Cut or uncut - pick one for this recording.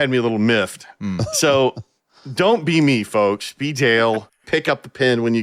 cut